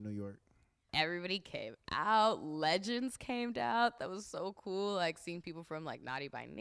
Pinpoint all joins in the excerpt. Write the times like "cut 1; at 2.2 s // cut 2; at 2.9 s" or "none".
cut 1; at 4.0 s